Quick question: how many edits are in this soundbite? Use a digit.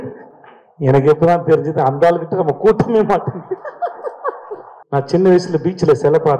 1